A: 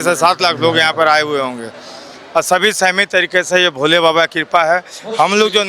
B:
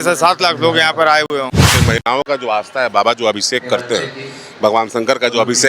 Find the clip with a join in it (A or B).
B